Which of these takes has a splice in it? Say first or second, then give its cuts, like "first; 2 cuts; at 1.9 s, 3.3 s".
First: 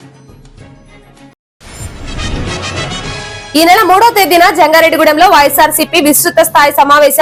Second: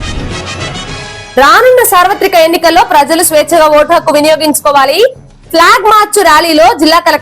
second; 1 cut; at 1.3 s